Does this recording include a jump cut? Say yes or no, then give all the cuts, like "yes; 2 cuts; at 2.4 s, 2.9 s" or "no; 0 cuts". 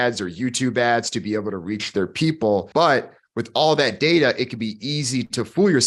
yes; 1 cut; at 2.7 s